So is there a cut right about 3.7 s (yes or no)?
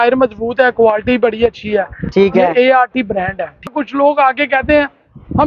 yes